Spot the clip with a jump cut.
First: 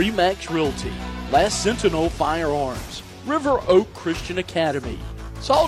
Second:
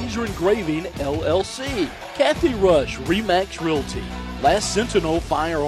second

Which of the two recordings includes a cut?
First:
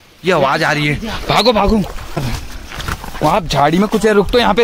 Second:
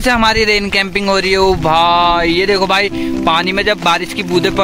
first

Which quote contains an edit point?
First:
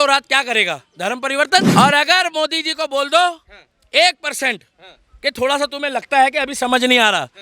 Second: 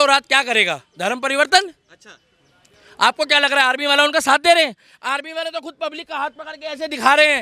first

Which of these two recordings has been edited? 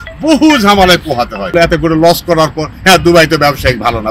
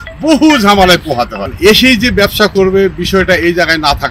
first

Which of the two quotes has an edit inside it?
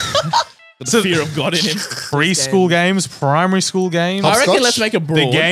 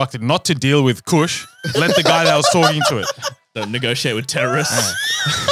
first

